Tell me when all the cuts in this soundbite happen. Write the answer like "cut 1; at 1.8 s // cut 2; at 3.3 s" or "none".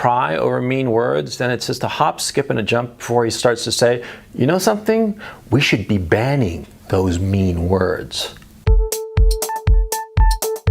cut 1; at 8.5 s